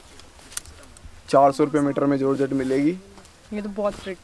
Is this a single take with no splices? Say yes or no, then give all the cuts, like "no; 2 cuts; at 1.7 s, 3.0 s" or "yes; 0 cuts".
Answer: no; 1 cut; at 1.3 s